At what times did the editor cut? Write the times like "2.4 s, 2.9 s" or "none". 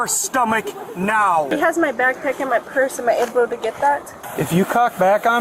1.5 s, 4.2 s

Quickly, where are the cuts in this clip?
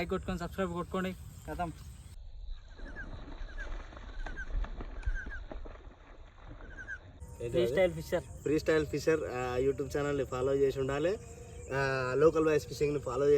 2.2 s, 7.2 s

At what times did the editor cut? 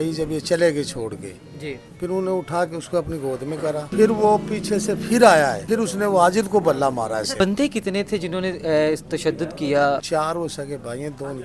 3.9 s, 5.6 s, 7.3 s, 10.0 s

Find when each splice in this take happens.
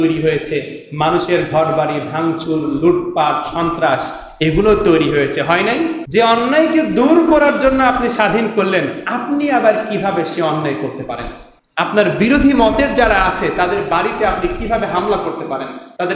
none

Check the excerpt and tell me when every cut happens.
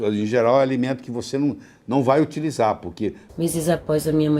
3.2 s

